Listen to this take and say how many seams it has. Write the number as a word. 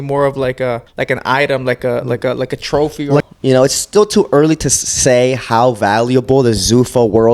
two